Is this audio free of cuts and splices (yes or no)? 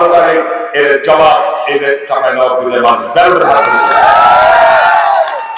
yes